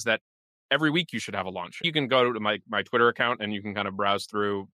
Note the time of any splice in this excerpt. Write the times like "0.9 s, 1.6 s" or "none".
1.8 s